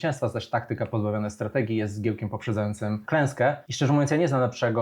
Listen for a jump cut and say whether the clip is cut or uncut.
cut